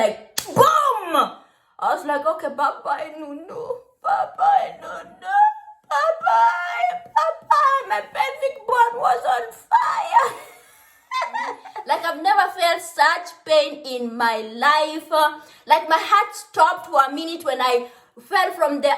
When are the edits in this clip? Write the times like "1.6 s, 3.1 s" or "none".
11.8 s